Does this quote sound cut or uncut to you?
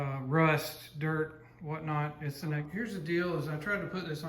cut